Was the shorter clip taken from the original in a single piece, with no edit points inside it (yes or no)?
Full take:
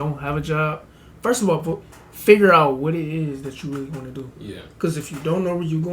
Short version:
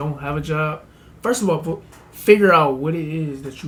yes